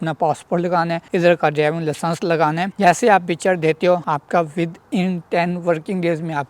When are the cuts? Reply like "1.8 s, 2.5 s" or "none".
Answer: 2.7 s, 4.0 s